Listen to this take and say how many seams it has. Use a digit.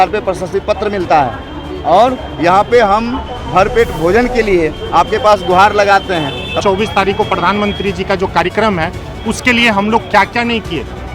1